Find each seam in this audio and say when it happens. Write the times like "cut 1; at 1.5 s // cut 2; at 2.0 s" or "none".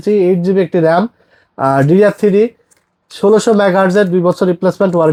none